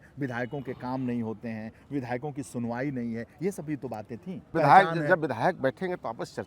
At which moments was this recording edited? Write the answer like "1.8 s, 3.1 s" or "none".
4.5 s